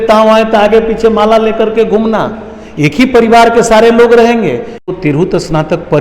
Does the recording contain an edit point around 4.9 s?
yes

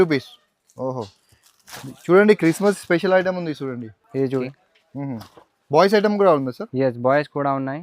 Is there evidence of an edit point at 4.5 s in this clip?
yes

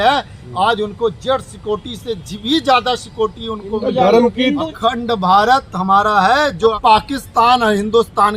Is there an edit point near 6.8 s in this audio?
yes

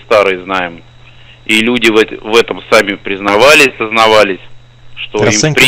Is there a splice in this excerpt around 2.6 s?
no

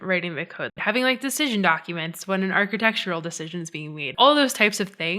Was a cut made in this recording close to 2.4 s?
no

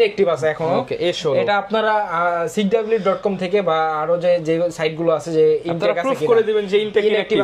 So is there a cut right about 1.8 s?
no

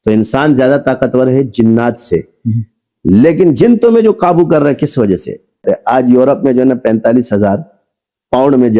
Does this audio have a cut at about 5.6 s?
yes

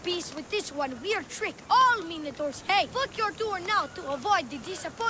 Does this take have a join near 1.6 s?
no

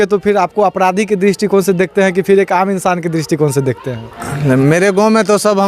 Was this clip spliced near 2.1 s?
no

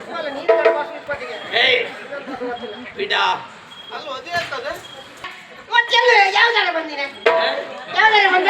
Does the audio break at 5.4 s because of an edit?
yes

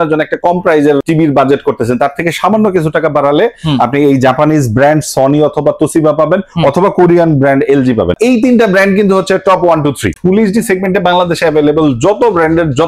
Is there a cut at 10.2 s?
yes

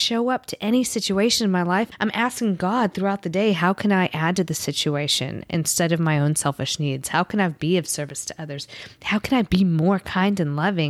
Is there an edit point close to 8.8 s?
no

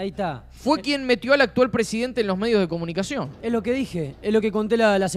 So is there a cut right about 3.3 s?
no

